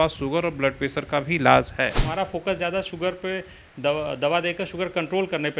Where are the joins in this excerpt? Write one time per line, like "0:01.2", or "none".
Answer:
0:02.0